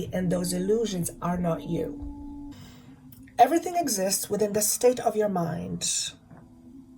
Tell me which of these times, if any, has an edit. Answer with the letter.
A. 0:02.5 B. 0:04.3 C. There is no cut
A